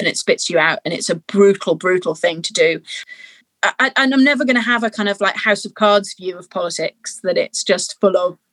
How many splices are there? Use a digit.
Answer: 1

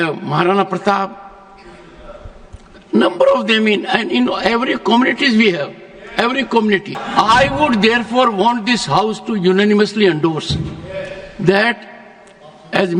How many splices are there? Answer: 1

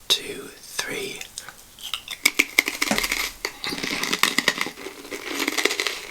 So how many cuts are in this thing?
0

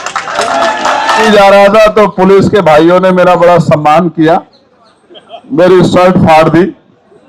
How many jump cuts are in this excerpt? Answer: 1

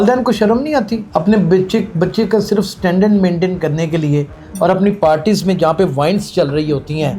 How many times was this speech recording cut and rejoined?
1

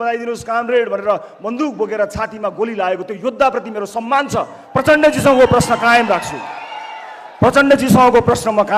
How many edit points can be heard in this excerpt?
0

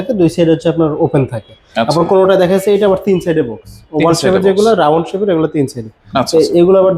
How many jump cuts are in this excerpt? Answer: 0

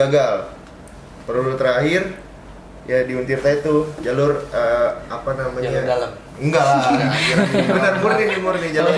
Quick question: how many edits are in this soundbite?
0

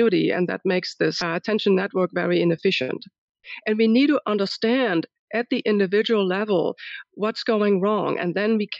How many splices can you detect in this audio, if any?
2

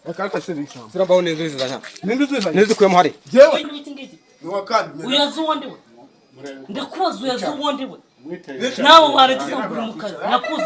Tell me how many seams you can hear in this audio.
1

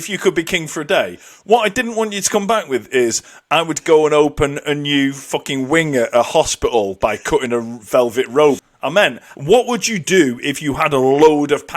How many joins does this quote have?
1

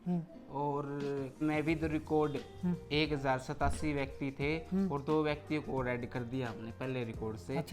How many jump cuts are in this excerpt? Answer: 1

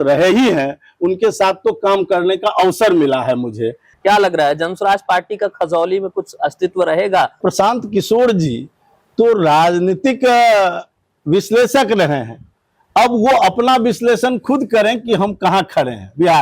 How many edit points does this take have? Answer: 2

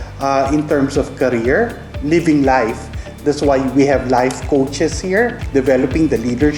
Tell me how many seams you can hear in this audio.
2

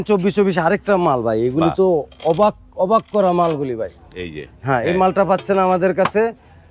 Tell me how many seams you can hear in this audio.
0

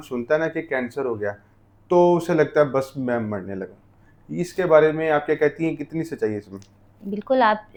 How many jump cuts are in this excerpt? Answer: 0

